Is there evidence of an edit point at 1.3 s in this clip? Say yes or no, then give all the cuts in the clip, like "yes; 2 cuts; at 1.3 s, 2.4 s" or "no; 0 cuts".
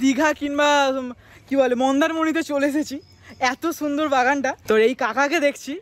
no; 1 cut; at 4.6 s